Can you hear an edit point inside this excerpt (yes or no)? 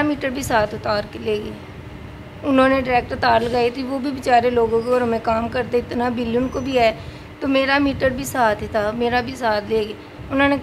no